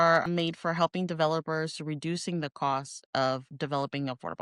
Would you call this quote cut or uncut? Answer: cut